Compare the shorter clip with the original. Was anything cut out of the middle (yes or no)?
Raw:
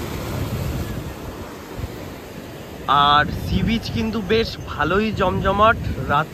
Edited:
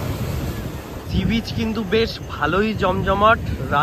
yes